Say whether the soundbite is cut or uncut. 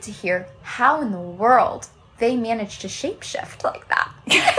uncut